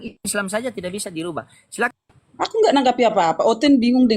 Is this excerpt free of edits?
no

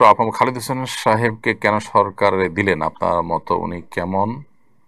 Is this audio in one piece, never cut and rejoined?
yes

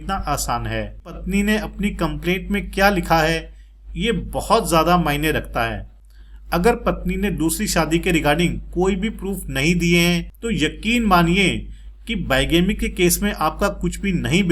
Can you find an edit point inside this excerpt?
yes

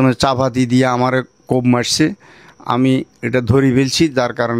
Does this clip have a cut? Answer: no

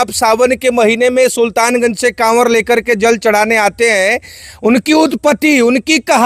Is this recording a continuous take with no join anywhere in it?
yes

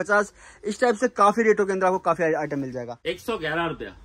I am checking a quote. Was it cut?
yes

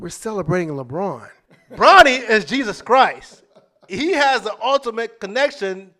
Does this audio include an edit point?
yes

